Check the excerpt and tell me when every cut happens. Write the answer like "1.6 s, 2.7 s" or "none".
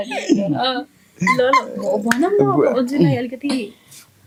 none